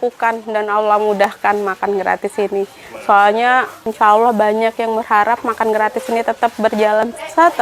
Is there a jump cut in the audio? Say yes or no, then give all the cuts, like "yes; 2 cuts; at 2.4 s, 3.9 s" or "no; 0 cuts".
no; 0 cuts